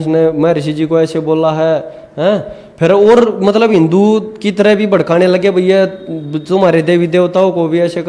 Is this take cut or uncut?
uncut